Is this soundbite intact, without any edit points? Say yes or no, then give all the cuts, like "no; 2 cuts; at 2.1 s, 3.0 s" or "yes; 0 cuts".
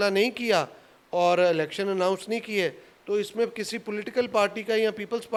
yes; 0 cuts